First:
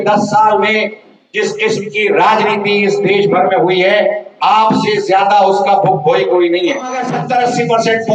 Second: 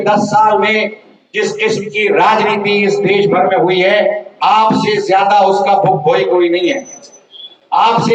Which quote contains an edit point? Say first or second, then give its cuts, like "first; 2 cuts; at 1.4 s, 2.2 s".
first; 1 cut; at 7.1 s